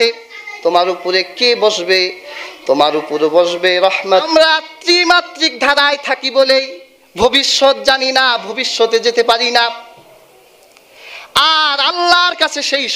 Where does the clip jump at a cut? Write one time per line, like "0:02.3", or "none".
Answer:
0:04.3